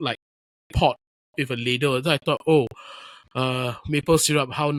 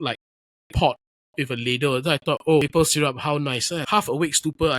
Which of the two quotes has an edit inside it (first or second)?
second